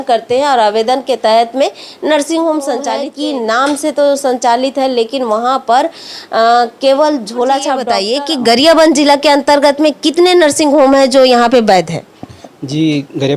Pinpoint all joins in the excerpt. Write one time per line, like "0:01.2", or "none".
0:03.0
0:08.0